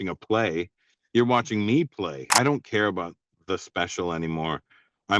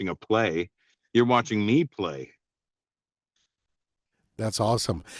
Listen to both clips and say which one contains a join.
first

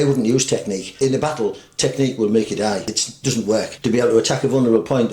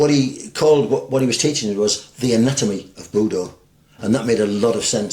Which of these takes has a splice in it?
first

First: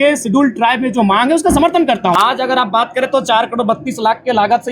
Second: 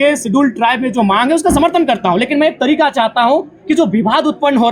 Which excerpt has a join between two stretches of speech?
first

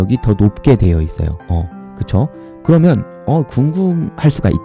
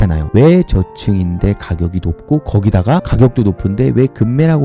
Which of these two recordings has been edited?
first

